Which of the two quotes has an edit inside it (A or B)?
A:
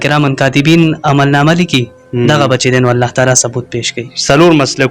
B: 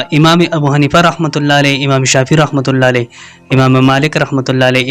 A